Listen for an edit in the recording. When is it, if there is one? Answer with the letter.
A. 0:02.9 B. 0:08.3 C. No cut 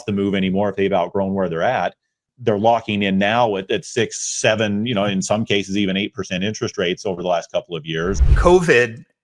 B